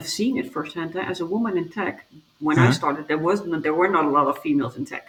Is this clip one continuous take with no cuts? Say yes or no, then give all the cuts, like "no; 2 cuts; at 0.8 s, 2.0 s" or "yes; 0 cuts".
yes; 0 cuts